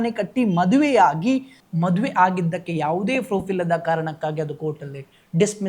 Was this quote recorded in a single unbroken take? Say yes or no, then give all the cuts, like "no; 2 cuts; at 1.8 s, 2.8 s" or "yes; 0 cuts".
no; 1 cut; at 1.6 s